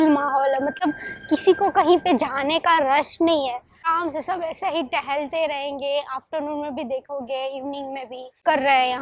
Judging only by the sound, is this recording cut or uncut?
uncut